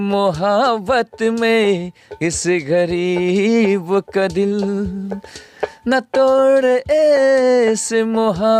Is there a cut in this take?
no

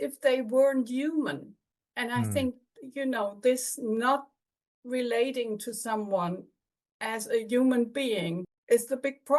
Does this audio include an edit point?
yes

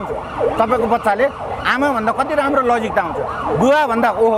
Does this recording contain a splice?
no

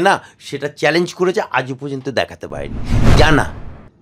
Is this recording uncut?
no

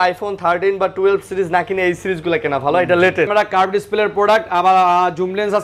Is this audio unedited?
no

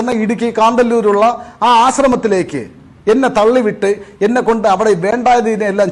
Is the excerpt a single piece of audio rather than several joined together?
yes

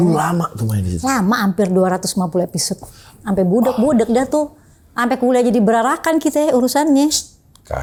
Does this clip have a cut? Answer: no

